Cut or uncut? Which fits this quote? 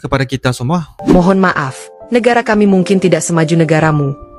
cut